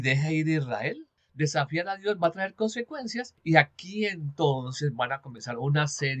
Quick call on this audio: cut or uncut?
cut